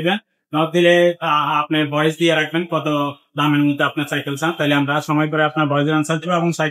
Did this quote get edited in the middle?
no; 0 cuts

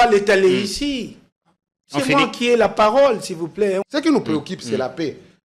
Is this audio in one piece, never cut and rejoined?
no; 1 cut; at 3.9 s

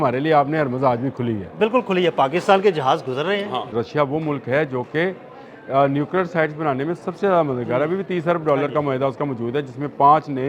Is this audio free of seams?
no; 1 cut; at 3.7 s

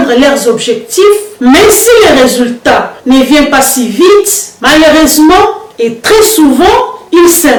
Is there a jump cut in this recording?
no; 0 cuts

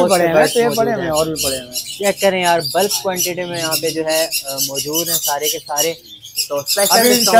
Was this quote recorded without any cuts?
yes; 0 cuts

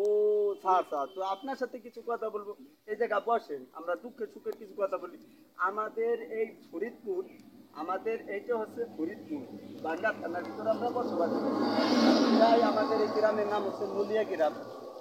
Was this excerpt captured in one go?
yes; 0 cuts

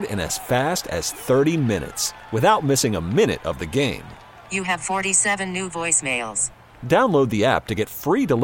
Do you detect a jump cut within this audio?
no; 0 cuts

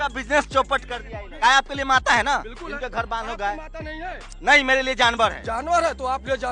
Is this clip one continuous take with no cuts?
no; 2 cuts; at 1.3 s, 5.4 s

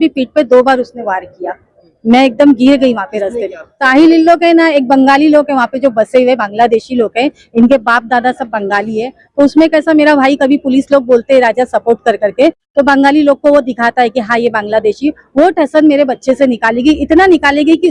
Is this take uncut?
no; 1 cut; at 3.7 s

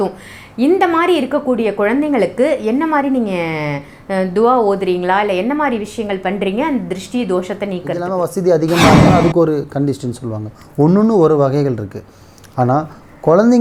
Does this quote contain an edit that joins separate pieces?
yes; 1 cut; at 8.0 s

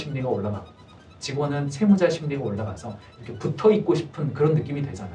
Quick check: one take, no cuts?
yes; 0 cuts

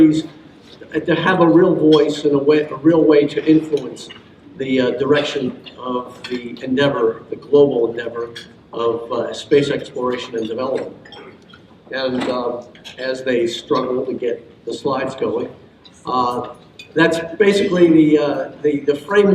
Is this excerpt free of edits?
no; 1 cut; at 10.0 s

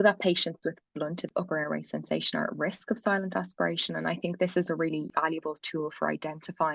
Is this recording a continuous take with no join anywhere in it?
no; 2 cuts; at 1.3 s, 5.1 s

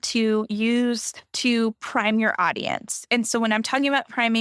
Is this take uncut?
yes; 0 cuts

